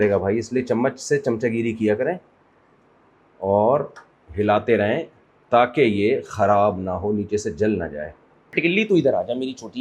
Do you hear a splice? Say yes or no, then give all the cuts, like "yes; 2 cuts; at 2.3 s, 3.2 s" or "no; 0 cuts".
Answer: yes; 1 cut; at 8.6 s